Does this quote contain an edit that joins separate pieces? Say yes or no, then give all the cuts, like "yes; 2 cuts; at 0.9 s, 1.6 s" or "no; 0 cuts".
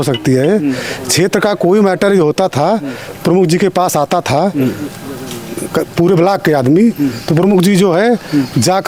no; 0 cuts